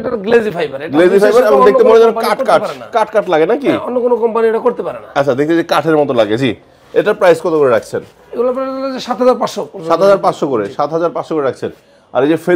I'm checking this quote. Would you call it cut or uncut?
uncut